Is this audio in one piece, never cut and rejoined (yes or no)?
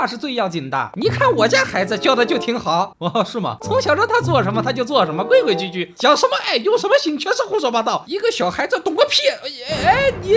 no